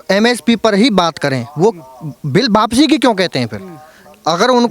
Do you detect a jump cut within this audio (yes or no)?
no